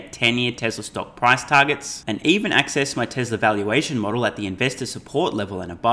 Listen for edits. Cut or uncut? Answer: uncut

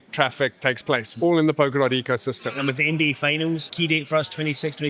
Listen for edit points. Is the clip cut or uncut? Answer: cut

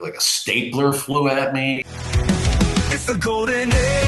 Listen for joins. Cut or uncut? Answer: cut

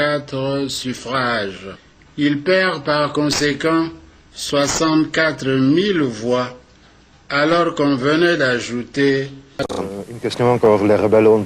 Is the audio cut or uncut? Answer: cut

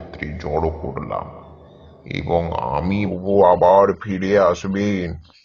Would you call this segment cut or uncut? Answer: cut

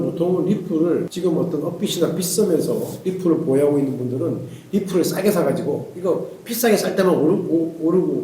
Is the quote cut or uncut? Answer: cut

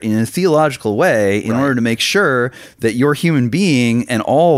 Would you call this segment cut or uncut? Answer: uncut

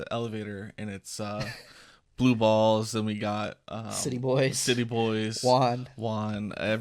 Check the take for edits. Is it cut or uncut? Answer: uncut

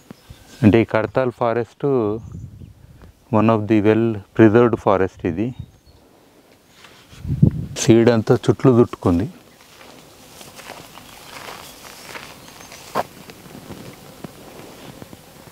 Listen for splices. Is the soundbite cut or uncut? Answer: cut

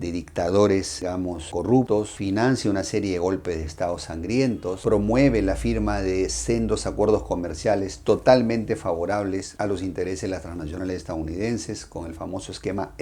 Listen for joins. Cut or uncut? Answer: uncut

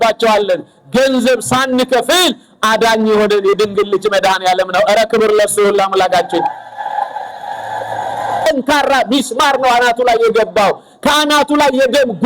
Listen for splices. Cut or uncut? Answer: cut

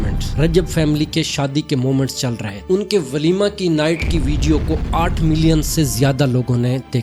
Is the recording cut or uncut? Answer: uncut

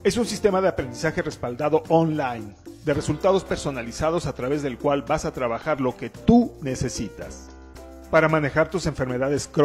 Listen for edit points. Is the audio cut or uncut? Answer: uncut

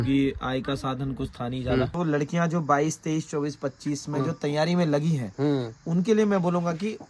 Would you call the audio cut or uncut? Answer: cut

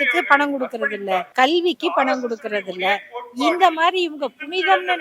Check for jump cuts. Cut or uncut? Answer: cut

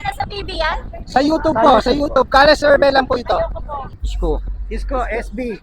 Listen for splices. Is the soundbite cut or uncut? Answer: cut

